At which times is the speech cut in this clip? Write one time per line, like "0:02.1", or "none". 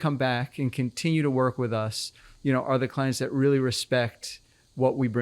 none